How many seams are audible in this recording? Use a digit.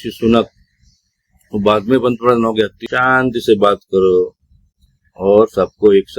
1